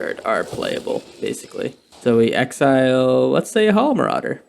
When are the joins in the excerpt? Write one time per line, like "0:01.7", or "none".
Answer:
0:01.9